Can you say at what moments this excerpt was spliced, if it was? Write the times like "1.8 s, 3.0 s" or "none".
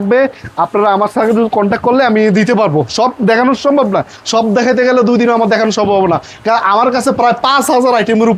none